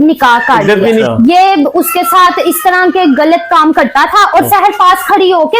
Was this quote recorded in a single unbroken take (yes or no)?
no